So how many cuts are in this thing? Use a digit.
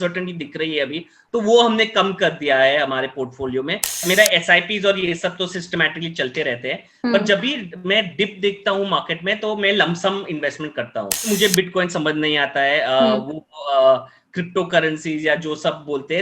2